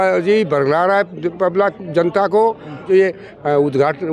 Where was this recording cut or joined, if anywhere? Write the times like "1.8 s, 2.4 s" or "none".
2.8 s